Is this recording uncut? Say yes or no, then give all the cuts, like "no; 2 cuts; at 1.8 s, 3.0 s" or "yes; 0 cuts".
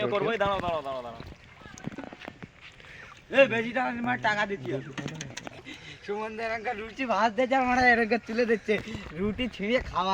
no; 1 cut; at 5.6 s